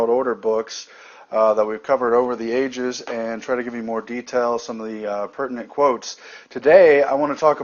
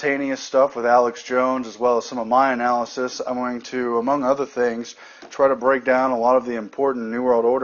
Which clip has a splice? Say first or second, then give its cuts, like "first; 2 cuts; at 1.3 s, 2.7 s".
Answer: first; 1 cut; at 1.8 s